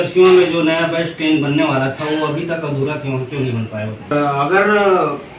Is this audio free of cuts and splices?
no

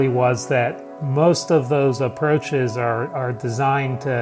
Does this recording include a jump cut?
no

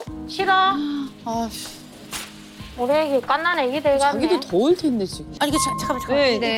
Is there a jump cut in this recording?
yes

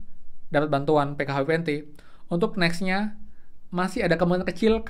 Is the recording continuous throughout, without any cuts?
yes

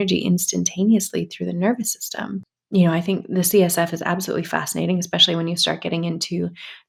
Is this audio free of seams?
yes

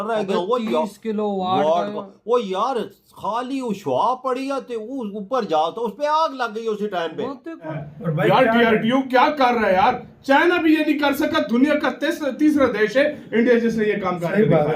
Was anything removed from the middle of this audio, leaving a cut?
yes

